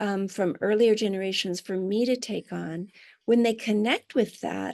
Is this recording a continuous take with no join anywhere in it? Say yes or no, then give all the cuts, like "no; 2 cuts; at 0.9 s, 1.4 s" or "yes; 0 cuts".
yes; 0 cuts